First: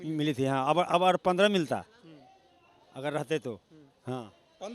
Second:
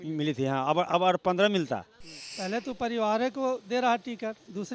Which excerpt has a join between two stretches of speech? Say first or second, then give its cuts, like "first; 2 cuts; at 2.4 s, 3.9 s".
second; 1 cut; at 2.2 s